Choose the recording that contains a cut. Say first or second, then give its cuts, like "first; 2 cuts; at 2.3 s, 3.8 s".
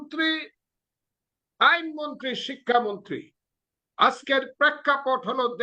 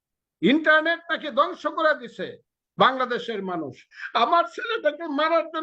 second; 1 cut; at 3.9 s